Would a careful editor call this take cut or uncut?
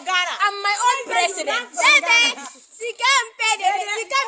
uncut